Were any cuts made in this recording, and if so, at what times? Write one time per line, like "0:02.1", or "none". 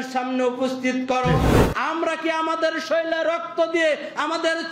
0:01.6